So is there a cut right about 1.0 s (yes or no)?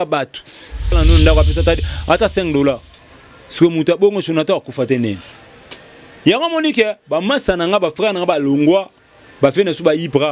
yes